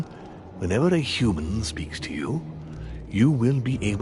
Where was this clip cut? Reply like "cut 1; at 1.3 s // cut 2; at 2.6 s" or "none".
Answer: cut 1; at 1.4 s